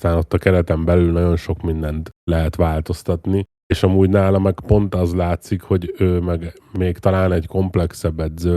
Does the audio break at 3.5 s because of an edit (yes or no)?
yes